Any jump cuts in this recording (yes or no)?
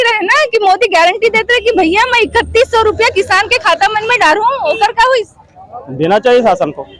no